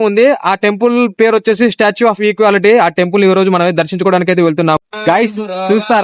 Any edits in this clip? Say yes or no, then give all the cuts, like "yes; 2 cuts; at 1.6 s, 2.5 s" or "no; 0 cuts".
yes; 1 cut; at 4.8 s